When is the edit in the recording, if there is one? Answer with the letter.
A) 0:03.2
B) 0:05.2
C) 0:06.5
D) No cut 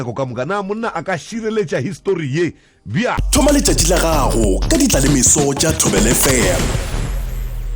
A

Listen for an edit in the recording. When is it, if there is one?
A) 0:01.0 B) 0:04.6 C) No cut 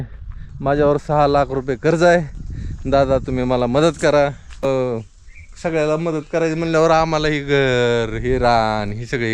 B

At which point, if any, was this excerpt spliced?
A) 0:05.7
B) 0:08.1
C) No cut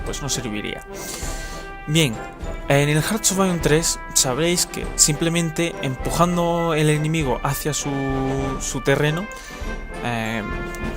A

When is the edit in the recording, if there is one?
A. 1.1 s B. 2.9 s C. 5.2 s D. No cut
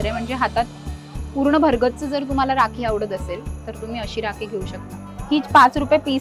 C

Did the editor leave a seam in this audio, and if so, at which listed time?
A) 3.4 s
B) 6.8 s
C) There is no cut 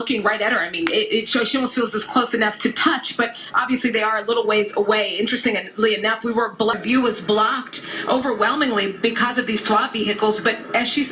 B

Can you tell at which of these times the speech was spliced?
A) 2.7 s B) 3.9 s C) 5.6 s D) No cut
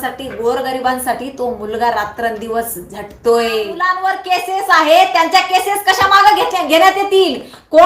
B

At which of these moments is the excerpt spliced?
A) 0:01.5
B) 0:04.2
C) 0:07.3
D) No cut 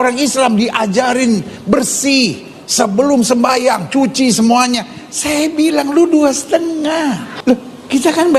C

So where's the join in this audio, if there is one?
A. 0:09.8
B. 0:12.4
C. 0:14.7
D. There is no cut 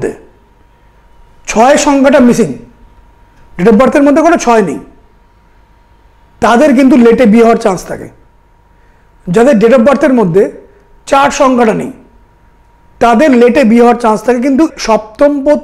C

